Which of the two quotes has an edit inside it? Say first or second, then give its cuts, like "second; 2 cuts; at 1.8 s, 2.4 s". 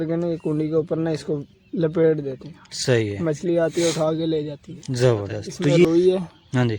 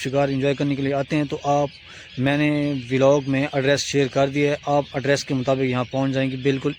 first; 1 cut; at 5.8 s